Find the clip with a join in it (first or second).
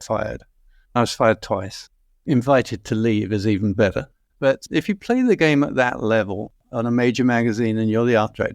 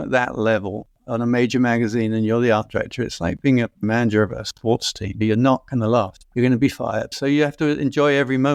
first